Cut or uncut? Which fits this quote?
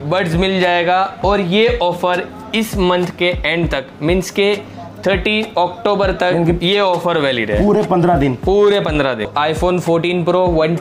cut